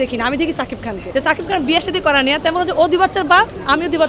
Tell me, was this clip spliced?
yes; 1 cut; at 1.0 s

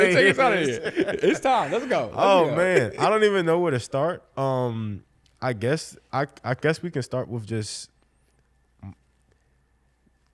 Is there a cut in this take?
no; 0 cuts

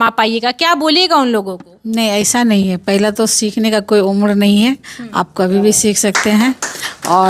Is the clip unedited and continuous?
yes; 0 cuts

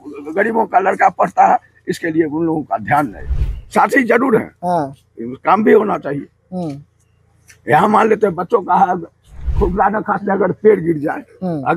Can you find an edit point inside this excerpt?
yes; 1 cut; at 3.3 s

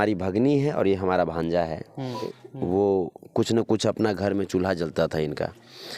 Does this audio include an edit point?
yes; 1 cut; at 2.4 s

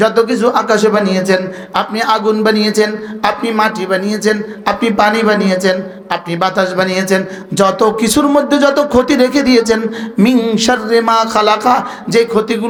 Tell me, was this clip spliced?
no; 0 cuts

